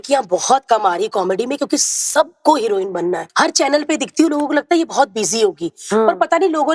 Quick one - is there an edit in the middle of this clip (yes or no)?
yes